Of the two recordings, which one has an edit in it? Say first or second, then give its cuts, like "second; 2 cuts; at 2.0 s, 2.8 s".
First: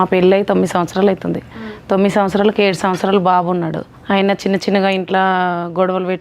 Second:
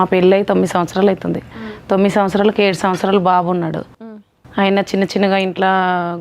first; 1 cut; at 3.9 s